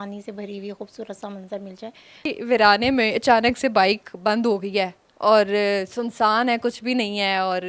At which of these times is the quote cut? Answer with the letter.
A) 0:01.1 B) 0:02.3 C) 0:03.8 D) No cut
B